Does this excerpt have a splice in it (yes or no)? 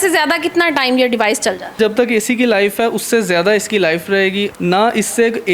yes